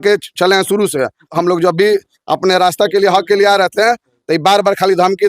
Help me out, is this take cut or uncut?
cut